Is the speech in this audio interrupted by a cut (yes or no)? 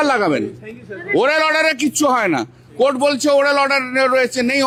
no